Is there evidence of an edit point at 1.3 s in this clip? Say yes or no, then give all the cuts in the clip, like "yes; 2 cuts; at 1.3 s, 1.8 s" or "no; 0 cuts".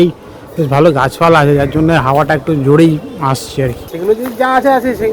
no; 1 cut; at 3.9 s